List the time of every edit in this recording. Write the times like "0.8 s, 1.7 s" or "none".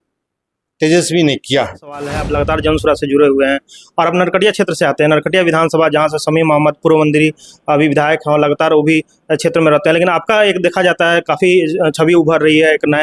2.2 s